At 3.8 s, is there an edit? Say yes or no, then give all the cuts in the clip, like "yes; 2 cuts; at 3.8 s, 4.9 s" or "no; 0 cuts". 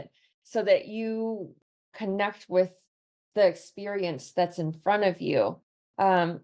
no; 1 cut; at 1.9 s